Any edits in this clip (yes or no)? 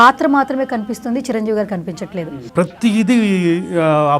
yes